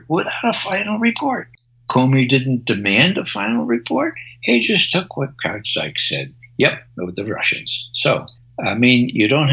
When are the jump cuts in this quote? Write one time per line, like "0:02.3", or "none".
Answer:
0:08.4